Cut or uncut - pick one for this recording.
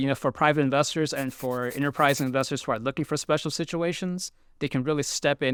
uncut